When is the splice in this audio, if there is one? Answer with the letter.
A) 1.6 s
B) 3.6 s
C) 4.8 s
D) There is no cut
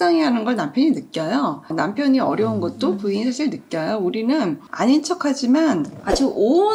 D